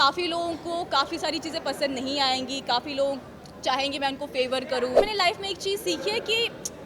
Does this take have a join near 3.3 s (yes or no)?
no